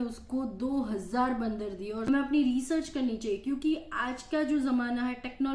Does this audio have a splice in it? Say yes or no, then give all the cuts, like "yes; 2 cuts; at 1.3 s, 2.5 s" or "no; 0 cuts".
yes; 1 cut; at 2.0 s